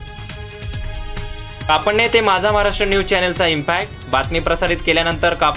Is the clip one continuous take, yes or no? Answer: no